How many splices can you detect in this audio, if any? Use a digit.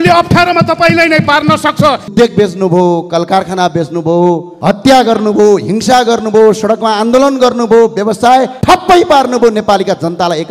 3